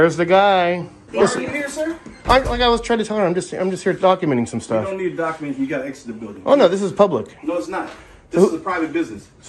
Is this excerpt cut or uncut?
cut